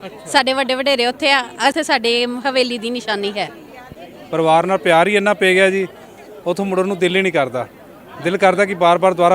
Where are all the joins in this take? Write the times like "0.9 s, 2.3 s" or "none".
1.7 s, 3.9 s